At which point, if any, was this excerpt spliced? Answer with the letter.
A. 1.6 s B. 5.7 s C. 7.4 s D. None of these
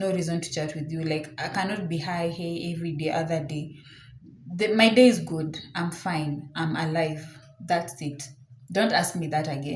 D